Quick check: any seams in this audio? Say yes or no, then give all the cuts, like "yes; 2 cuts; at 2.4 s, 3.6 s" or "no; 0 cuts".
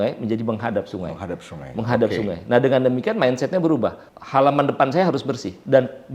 no; 0 cuts